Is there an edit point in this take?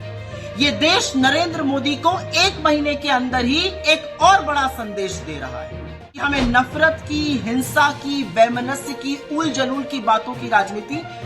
yes; 1 cut; at 6.2 s

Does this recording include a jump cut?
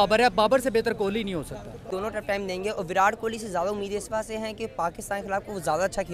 yes; 1 cut; at 1.8 s

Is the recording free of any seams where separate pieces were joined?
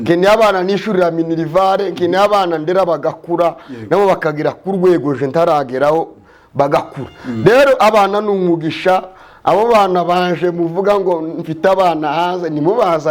yes; 0 cuts

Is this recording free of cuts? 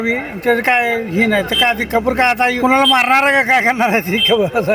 no; 1 cut; at 2.6 s

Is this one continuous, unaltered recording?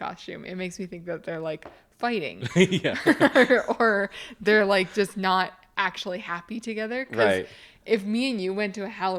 yes; 0 cuts

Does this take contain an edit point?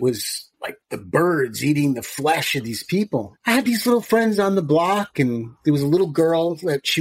no; 0 cuts

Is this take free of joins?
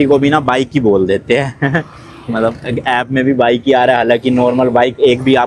yes; 0 cuts

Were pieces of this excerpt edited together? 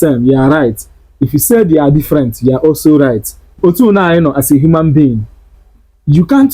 yes; 1 cut; at 3.6 s

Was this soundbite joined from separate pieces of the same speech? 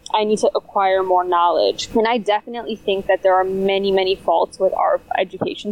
yes; 1 cut; at 1.8 s

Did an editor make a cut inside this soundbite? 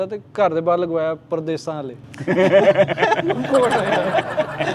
no; 0 cuts

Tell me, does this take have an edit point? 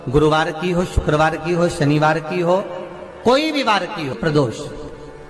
yes; 1 cut; at 4.2 s

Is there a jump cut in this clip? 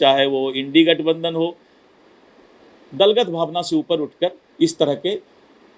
no; 0 cuts

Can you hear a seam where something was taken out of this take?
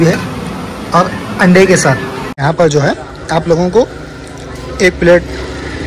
yes; 1 cut; at 2.2 s

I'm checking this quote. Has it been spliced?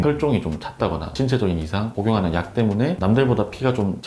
yes; 1 cut; at 1.1 s

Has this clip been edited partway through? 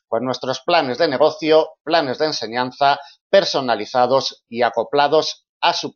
no; 0 cuts

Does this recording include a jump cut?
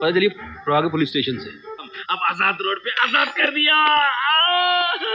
yes; 1 cut; at 1.9 s

